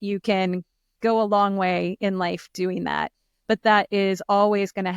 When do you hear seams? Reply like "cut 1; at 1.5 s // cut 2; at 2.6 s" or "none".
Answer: cut 1; at 3.3 s